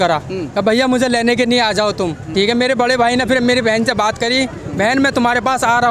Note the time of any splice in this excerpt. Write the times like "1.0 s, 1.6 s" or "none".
2.2 s